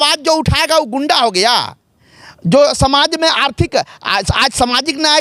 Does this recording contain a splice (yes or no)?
no